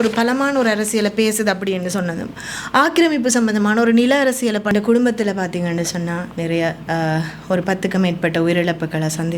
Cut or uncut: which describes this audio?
cut